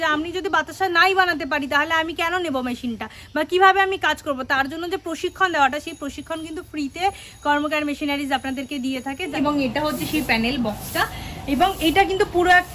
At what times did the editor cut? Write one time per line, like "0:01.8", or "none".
0:09.3